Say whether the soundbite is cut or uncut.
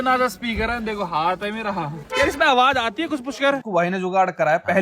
cut